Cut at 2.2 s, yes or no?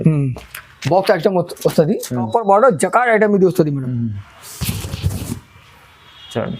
yes